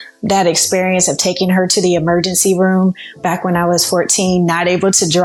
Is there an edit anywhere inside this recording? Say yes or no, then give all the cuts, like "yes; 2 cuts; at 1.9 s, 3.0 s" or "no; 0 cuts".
no; 0 cuts